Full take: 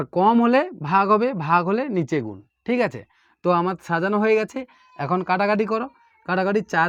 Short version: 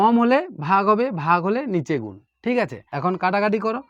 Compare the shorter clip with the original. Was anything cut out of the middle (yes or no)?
yes